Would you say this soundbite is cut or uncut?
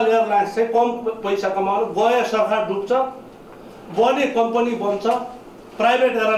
uncut